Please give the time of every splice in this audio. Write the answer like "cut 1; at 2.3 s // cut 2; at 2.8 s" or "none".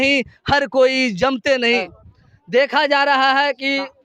cut 1; at 2.0 s